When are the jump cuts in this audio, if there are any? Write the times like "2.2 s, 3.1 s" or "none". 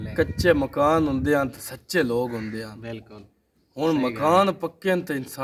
none